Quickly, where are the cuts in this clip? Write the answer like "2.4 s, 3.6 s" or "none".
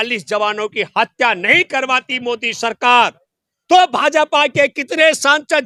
none